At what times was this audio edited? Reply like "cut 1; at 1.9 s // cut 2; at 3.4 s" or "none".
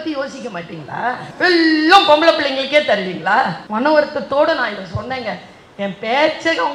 cut 1; at 1.3 s // cut 2; at 3.6 s